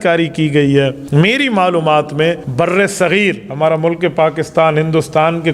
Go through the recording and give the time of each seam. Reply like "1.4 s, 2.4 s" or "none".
1.0 s, 2.4 s